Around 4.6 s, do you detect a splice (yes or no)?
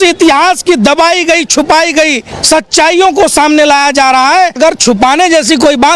yes